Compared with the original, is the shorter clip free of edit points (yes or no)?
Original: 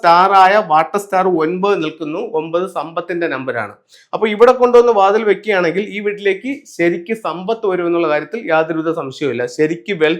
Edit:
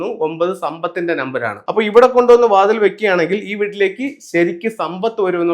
no